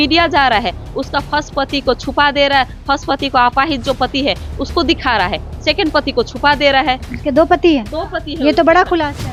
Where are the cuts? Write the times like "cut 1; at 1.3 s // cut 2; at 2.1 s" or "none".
none